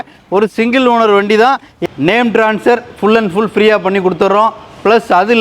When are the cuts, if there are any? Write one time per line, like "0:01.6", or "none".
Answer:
0:01.7

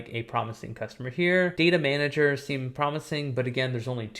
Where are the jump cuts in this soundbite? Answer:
none

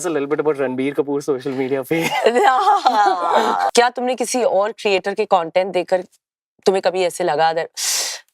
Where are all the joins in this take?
0:03.7

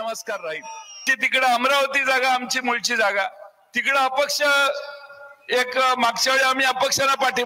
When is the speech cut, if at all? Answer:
0:01.2

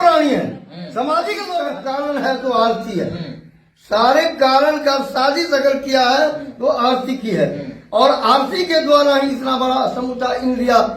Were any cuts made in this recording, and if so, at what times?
0:01.8

